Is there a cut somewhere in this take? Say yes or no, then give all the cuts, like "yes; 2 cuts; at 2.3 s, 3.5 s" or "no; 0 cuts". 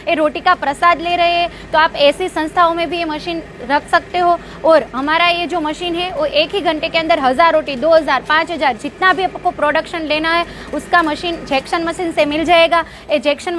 no; 0 cuts